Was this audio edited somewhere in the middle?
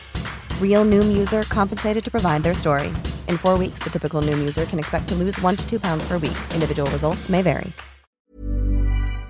yes; 1 cut; at 8.3 s

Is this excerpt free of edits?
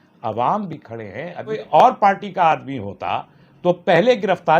no; 1 cut; at 1.6 s

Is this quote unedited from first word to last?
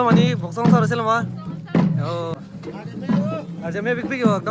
no; 1 cut; at 2.4 s

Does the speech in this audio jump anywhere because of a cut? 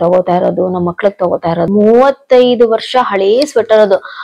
yes; 1 cut; at 1.7 s

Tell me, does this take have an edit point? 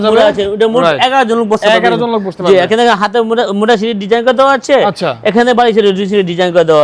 no; 0 cuts

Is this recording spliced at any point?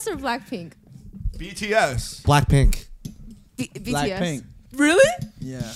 no; 0 cuts

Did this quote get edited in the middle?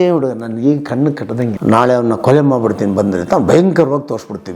yes; 1 cut; at 1.6 s

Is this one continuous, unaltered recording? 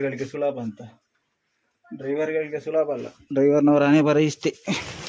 yes; 0 cuts

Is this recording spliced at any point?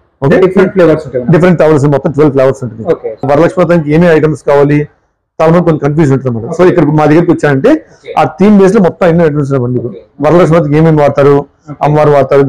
yes; 1 cut; at 3.3 s

